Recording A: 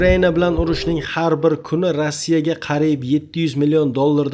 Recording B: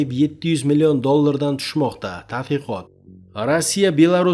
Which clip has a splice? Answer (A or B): B